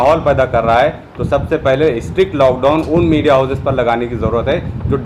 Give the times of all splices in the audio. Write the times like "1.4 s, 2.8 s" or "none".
none